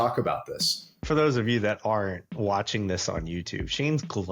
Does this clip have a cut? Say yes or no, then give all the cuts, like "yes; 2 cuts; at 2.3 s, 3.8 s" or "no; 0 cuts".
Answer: yes; 1 cut; at 1.0 s